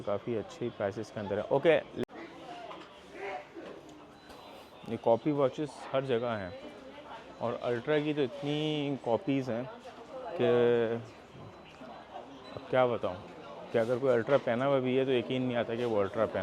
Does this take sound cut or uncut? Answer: cut